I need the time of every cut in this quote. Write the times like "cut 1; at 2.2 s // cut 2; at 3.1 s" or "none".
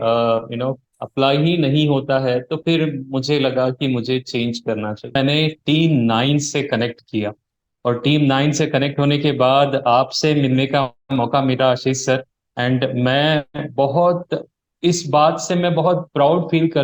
cut 1; at 5.1 s